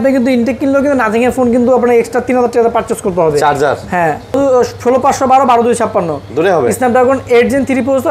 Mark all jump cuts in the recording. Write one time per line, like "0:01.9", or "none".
0:04.3